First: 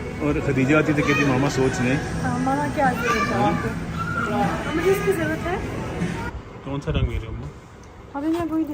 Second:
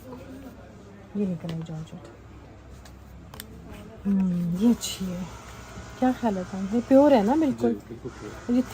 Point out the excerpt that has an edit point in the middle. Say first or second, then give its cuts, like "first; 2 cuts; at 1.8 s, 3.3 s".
first; 1 cut; at 6.3 s